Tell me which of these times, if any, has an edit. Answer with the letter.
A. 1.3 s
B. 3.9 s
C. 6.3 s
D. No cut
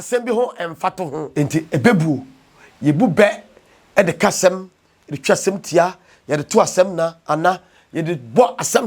A